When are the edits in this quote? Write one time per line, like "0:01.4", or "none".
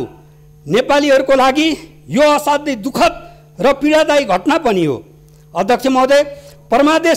none